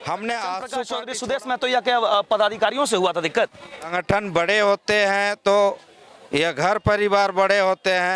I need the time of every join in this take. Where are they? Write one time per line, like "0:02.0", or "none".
0:01.0
0:03.9